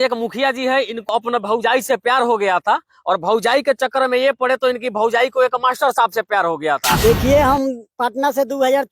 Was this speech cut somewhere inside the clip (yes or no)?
yes